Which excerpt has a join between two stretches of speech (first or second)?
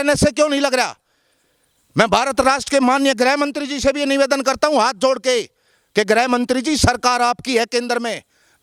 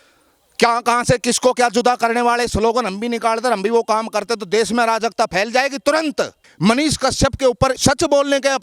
second